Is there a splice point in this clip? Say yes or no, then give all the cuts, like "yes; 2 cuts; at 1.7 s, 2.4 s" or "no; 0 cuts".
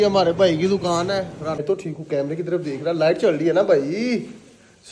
yes; 1 cut; at 1.6 s